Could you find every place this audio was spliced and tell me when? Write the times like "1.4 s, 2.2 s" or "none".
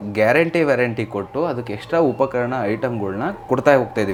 none